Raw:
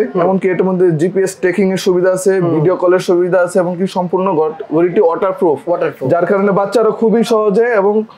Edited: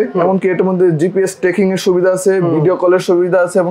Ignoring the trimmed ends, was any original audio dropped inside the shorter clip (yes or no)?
no